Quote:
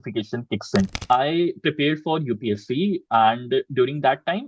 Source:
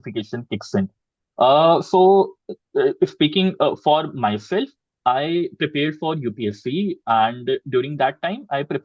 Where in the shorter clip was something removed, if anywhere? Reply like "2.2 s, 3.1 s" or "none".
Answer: 1.0 s